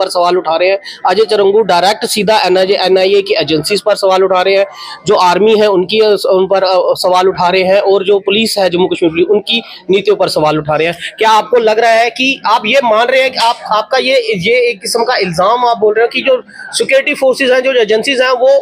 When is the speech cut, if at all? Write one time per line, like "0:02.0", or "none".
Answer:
none